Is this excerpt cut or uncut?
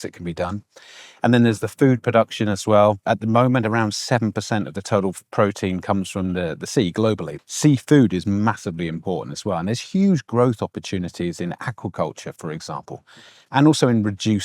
cut